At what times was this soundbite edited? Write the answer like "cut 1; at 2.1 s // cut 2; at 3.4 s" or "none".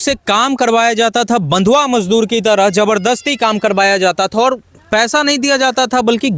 none